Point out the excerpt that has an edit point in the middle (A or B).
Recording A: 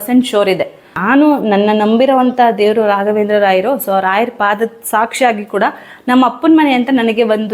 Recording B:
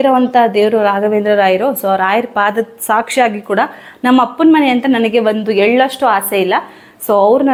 A